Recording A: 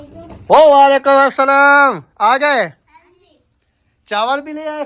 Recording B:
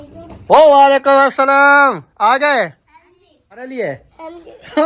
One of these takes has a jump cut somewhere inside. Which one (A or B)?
B